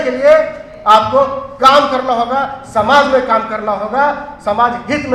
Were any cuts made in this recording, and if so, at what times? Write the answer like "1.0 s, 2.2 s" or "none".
none